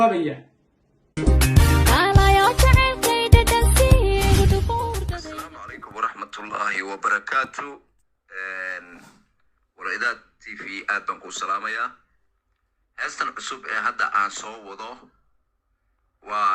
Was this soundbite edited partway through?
yes; 1 cut; at 5.2 s

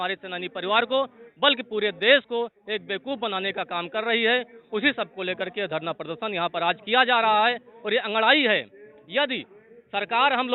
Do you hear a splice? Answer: no; 0 cuts

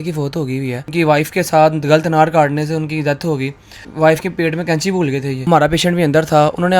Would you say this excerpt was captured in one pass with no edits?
no; 3 cuts; at 0.9 s, 3.9 s, 5.4 s

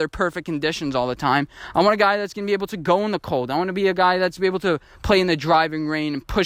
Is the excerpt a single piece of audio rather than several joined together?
yes; 0 cuts

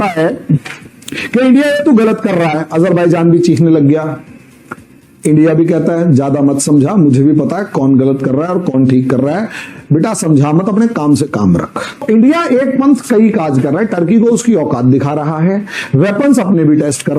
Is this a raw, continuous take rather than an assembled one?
no; 1 cut; at 12.0 s

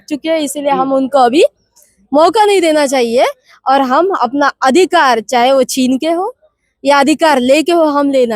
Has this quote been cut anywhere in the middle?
no; 0 cuts

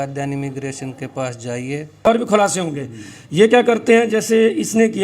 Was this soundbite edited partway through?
yes; 1 cut; at 2.0 s

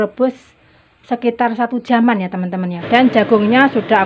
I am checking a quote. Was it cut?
yes; 1 cut; at 2.8 s

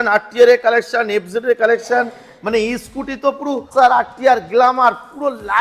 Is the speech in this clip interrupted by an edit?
yes; 1 cut; at 3.7 s

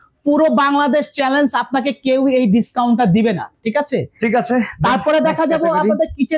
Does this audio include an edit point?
no; 0 cuts

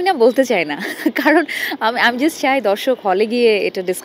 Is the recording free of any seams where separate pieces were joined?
yes; 0 cuts

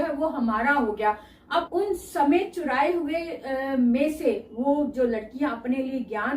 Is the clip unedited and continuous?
no; 1 cut; at 1.7 s

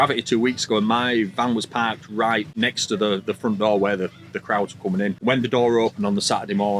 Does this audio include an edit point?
yes; 2 cuts; at 2.5 s, 5.2 s

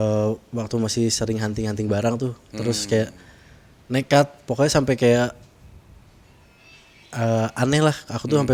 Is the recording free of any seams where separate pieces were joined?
yes; 0 cuts

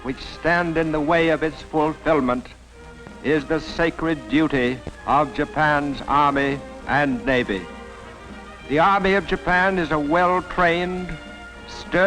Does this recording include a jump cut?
yes; 1 cut; at 6.4 s

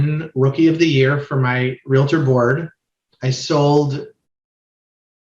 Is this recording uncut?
yes; 0 cuts

